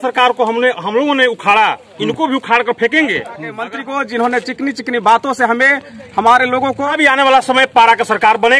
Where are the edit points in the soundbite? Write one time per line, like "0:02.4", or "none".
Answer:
0:03.6
0:06.9